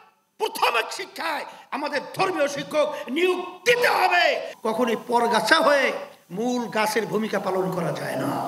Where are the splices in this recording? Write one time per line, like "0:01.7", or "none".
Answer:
0:04.5

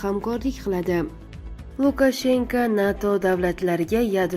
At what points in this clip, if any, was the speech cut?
0:01.4

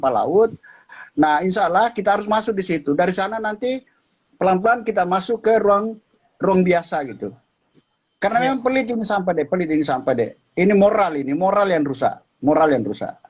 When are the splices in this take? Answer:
none

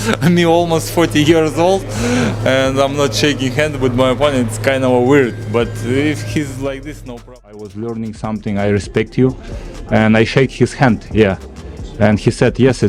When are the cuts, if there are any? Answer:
0:07.3

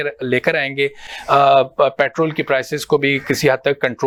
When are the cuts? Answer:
none

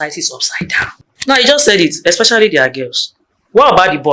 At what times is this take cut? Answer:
0:01.2

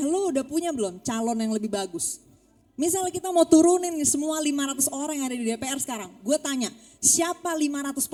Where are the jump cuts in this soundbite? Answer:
none

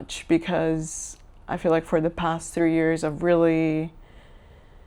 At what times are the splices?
none

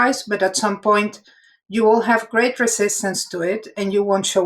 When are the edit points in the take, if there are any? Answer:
none

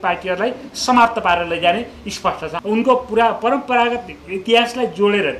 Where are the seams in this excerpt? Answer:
0:02.5

